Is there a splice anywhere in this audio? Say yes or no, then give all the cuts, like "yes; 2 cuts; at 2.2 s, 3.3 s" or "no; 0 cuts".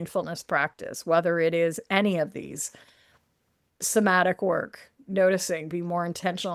no; 0 cuts